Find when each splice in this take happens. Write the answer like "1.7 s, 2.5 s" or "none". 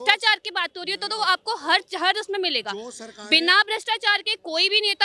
none